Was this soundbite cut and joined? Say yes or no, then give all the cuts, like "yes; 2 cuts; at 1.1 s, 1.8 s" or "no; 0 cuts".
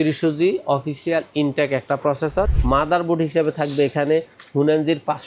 yes; 1 cut; at 2.5 s